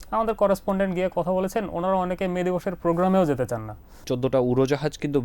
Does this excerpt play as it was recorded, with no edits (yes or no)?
no